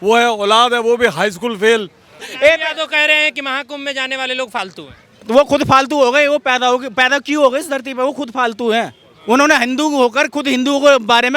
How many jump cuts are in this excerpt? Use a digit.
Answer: 1